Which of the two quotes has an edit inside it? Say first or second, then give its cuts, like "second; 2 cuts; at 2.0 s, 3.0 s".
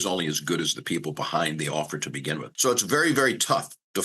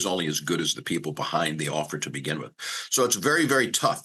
first; 1 cut; at 2.5 s